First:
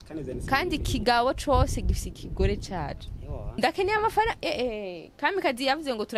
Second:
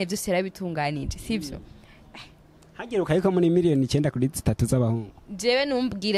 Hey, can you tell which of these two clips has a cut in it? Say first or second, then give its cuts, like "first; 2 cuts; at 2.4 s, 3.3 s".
first; 1 cut; at 3.6 s